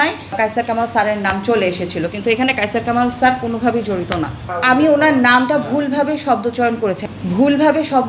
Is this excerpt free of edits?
no; 2 cuts; at 4.5 s, 7.0 s

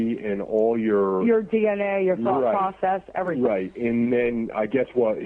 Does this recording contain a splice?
yes; 1 cut; at 2.2 s

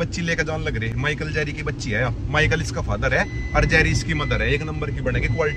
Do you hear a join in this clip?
no; 0 cuts

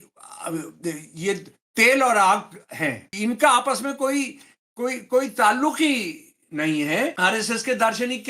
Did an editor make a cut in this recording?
yes; 2 cuts; at 3.1 s, 7.2 s

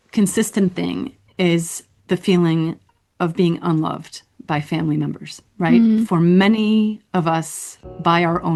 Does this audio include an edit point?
no; 0 cuts

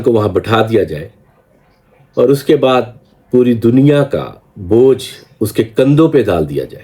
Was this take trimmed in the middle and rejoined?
no; 0 cuts

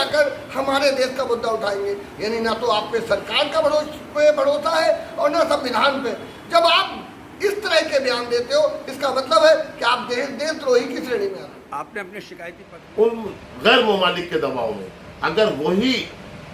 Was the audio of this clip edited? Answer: yes; 1 cut; at 12.2 s

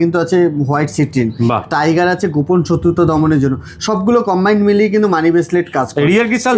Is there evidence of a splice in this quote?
no; 0 cuts

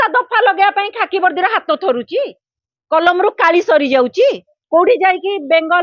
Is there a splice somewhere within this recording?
yes; 1 cut; at 4.5 s

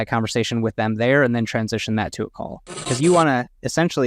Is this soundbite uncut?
no; 1 cut; at 2.9 s

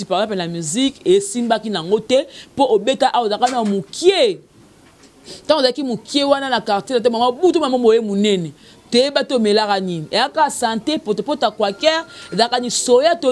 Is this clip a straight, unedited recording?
yes; 0 cuts

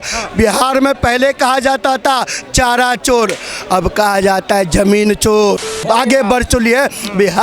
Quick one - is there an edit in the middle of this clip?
yes; 1 cut; at 5.7 s

